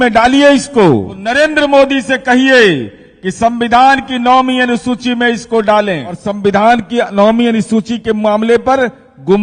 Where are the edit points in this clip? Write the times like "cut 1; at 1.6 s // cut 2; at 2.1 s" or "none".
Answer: cut 1; at 1.2 s // cut 2; at 6.3 s